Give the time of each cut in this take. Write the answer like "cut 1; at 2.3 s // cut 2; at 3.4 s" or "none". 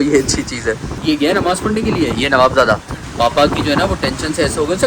cut 1; at 1.0 s // cut 2; at 3.0 s